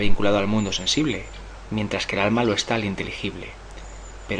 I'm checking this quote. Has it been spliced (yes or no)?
no